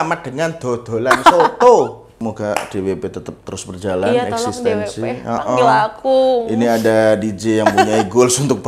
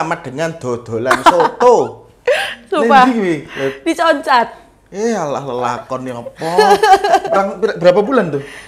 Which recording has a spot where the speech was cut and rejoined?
first; 1 cut; at 2.1 s

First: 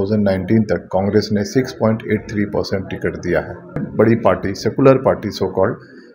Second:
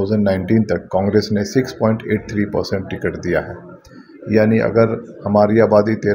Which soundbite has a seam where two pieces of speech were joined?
first; 1 cut; at 3.9 s

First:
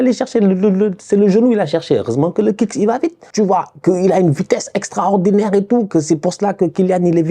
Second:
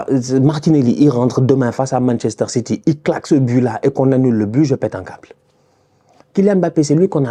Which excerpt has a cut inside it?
first; 1 cut; at 3.2 s

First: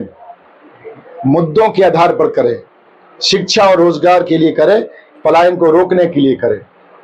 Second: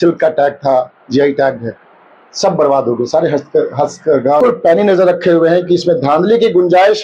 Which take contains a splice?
second; 1 cut; at 4.4 s

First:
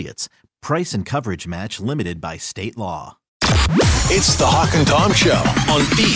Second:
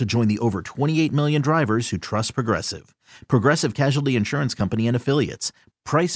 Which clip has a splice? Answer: first; 1 cut; at 3.3 s

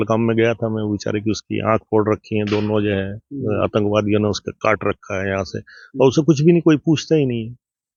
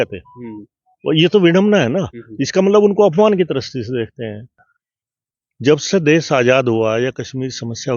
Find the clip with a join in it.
second; 1 cut; at 4.5 s

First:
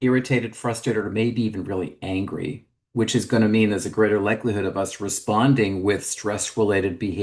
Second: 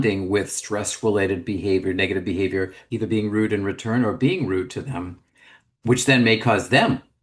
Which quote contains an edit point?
second; 1 cut; at 2.8 s

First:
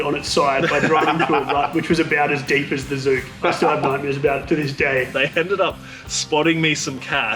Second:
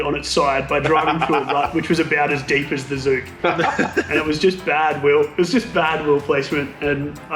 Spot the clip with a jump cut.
first; 2 cuts; at 3.6 s, 5.1 s

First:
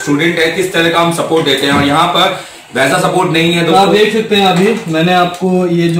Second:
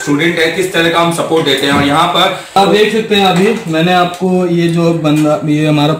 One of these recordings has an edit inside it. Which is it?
second; 1 cut; at 2.6 s

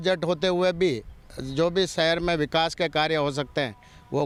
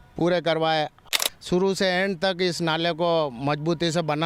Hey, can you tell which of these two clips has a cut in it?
second; 1 cut; at 1.0 s

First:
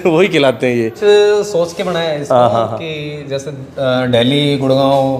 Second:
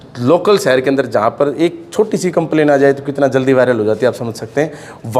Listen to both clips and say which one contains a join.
first; 1 cut; at 1.0 s

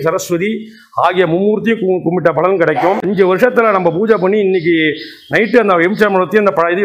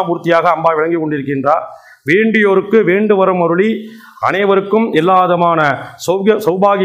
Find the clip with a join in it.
first; 1 cut; at 3.0 s

